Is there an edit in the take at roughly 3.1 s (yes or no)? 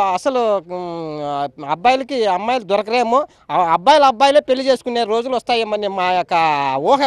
no